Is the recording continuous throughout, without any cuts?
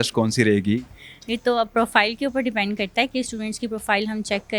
yes; 0 cuts

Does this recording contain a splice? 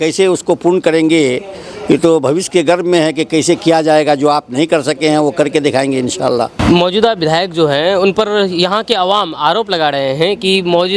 no; 0 cuts

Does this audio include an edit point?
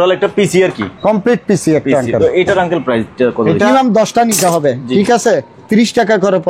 yes; 1 cut; at 3.7 s

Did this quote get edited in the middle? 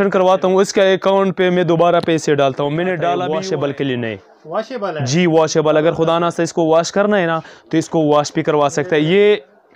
yes; 1 cut; at 3.3 s

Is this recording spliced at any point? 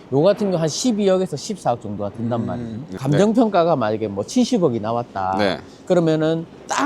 yes; 1 cut; at 2.9 s

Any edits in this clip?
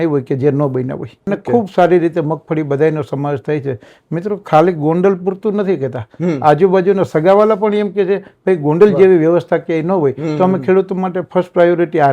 yes; 1 cut; at 1.1 s

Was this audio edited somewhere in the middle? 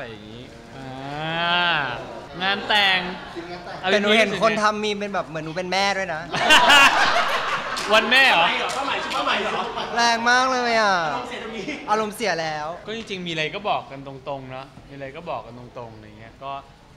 yes; 2 cuts; at 2.2 s, 12.8 s

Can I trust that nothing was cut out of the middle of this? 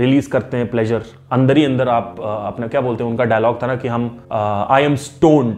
no; 2 cuts; at 1.2 s, 4.2 s

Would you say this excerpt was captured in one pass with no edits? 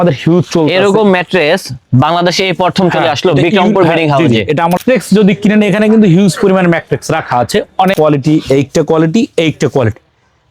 no; 2 cuts; at 4.8 s, 7.9 s

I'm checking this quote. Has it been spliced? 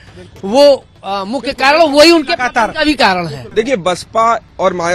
yes; 1 cut; at 3.4 s

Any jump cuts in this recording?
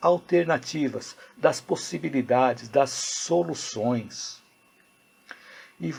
no; 0 cuts

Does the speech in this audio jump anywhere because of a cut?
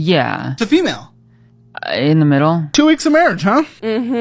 yes; 1 cut; at 2.7 s

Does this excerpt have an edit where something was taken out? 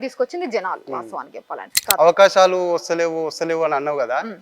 yes; 1 cut; at 1.8 s

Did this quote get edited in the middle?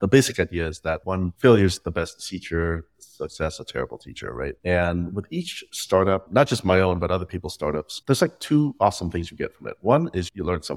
yes; 3 cuts; at 1.0 s, 5.9 s, 8.0 s

